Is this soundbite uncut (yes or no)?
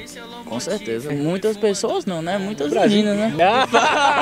no